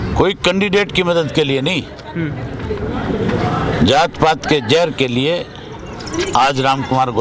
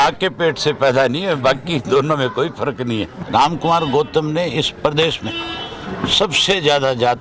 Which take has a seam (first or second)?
second